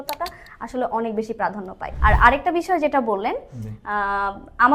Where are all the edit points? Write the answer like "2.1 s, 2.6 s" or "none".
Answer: 1.9 s